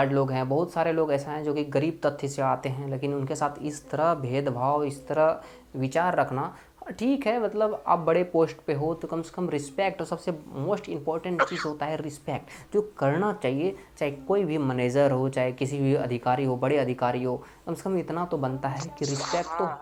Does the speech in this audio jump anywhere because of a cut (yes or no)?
no